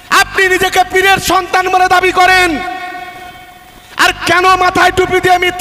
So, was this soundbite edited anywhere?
no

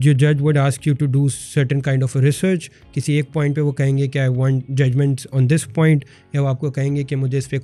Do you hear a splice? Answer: no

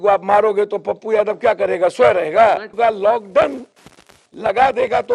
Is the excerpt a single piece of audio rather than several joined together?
no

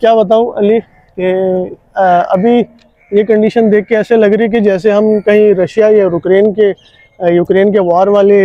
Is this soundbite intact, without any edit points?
yes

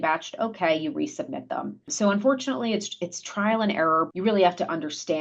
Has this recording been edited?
no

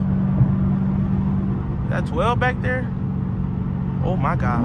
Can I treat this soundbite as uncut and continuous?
yes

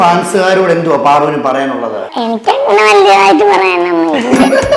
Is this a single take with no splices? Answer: no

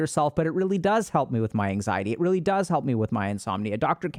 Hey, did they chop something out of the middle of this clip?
no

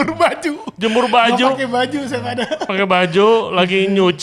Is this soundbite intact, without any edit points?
no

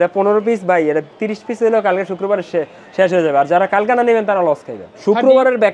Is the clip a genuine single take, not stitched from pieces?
no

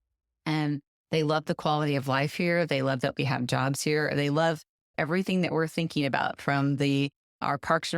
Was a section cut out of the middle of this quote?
no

